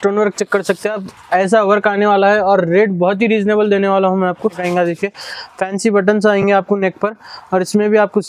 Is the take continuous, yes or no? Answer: no